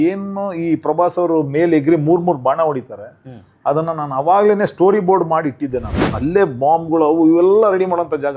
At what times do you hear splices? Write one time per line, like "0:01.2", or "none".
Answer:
0:06.0